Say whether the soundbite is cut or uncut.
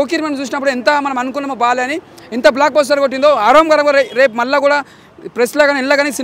uncut